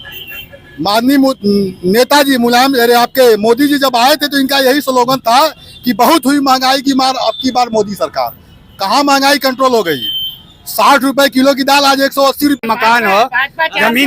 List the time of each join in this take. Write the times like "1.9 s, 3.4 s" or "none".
12.6 s